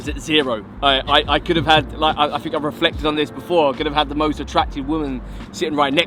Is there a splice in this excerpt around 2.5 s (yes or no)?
no